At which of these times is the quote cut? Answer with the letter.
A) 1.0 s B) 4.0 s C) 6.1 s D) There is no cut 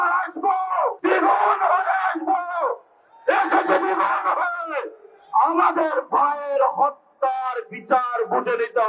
A